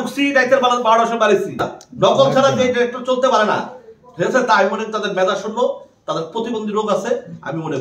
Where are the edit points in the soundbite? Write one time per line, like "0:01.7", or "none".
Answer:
0:01.7